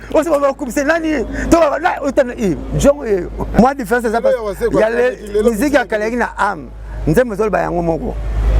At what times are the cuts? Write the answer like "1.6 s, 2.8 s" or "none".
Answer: 3.6 s

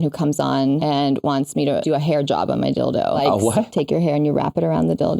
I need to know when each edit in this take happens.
0.8 s, 1.8 s, 3.7 s

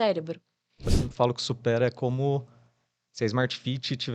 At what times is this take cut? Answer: 1.0 s

